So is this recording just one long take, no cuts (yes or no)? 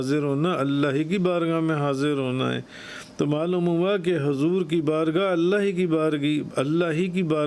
yes